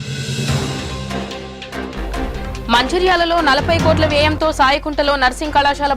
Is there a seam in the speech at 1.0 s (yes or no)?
yes